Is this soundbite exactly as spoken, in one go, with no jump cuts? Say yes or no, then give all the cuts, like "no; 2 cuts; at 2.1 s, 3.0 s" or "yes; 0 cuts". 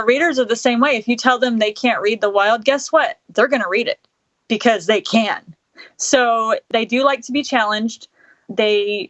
no; 1 cut; at 6.6 s